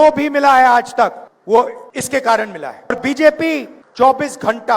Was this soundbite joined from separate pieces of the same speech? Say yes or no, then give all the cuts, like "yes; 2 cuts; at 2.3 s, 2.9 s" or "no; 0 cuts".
yes; 4 cuts; at 1.3 s, 1.8 s, 2.9 s, 3.8 s